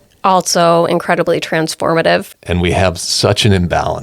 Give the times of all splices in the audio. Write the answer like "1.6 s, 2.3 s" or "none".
2.3 s